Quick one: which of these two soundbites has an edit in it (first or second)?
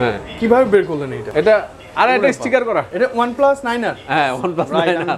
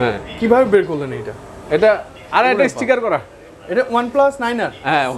first